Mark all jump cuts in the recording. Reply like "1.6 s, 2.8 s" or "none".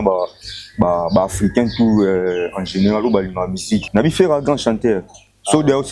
3.8 s